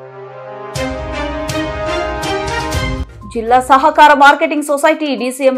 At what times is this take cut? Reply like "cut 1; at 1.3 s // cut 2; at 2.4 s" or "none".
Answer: cut 1; at 3.0 s